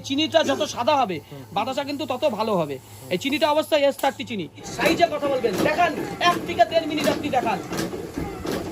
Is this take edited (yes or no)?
yes